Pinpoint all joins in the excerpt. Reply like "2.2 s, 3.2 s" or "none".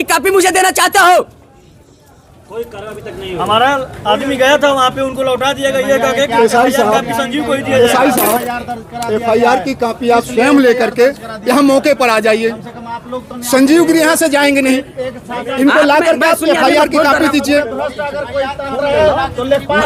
none